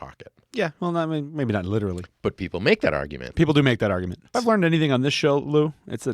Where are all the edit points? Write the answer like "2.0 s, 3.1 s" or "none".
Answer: 2.1 s, 4.2 s